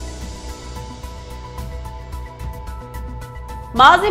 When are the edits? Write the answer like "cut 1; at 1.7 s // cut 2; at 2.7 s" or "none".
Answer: cut 1; at 3.2 s